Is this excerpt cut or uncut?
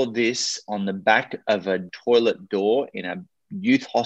cut